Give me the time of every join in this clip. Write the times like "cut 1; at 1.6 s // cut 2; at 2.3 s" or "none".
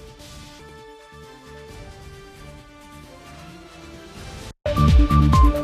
cut 1; at 4.6 s